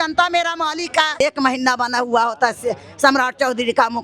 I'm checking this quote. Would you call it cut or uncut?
cut